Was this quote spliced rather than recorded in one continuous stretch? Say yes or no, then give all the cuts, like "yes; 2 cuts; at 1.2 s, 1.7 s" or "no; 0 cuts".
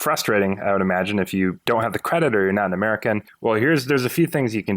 yes; 2 cuts; at 1.6 s, 3.3 s